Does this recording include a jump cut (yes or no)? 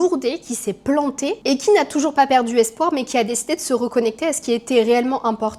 no